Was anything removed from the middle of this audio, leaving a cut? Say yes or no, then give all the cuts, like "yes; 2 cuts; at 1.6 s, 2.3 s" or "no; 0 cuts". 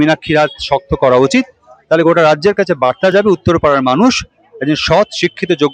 no; 0 cuts